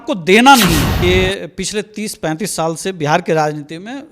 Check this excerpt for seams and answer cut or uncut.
cut